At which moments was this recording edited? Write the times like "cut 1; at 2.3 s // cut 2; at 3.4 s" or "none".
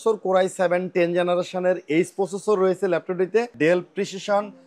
cut 1; at 3.5 s